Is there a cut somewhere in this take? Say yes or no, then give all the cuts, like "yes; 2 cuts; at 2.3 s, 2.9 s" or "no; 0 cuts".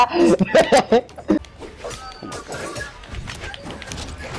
yes; 1 cut; at 1.4 s